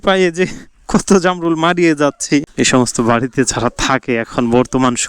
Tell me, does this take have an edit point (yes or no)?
yes